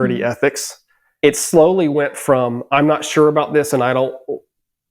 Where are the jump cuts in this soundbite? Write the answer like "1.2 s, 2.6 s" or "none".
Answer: 1.0 s